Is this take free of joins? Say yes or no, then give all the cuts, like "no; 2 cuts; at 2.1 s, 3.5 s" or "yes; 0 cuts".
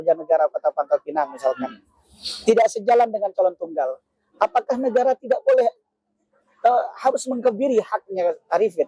yes; 0 cuts